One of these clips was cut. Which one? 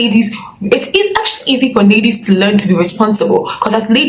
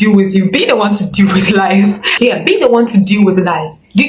second; 1 cut; at 2.0 s

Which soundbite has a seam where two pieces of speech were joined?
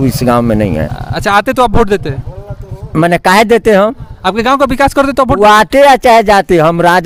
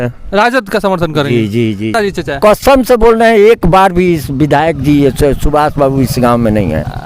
second; 1 cut; at 1.9 s

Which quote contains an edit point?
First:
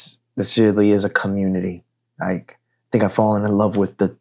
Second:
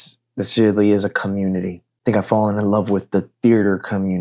second; 1 cut; at 1.8 s

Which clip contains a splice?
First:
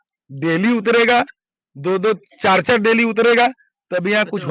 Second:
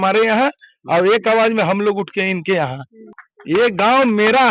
second; 1 cut; at 3.1 s

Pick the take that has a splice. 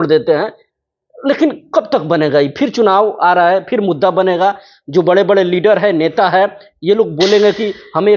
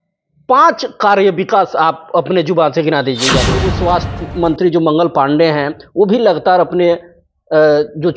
second; 1 cut; at 3.7 s

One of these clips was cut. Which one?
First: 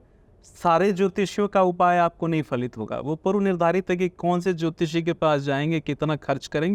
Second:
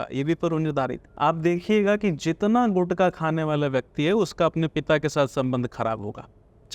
second; 1 cut; at 1.0 s

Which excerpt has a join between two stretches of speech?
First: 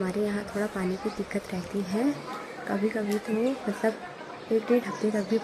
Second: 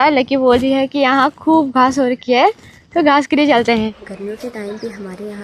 second; 1 cut; at 4.1 s

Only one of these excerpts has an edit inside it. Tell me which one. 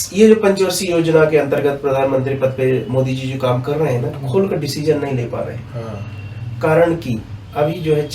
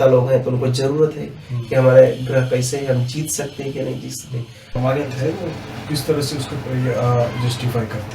second; 1 cut; at 4.8 s

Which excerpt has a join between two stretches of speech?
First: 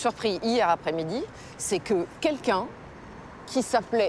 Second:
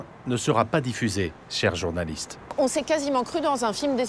second; 2 cuts; at 1.4 s, 2.5 s

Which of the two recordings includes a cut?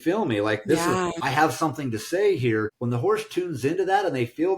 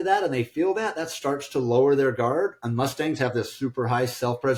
first; 2 cuts; at 1.2 s, 2.8 s

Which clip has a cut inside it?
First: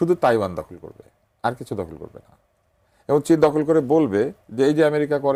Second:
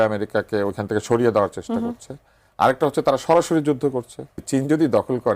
second; 1 cut; at 4.4 s

